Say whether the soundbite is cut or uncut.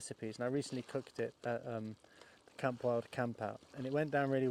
uncut